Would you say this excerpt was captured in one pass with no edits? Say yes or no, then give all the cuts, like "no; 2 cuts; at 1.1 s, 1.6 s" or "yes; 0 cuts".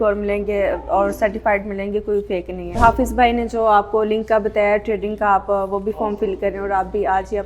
no; 1 cut; at 2.8 s